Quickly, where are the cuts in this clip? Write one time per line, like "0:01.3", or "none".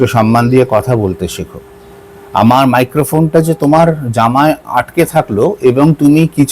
0:02.1